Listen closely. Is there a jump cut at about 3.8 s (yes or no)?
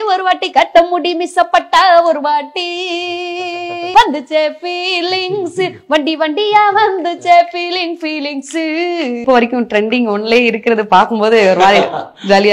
yes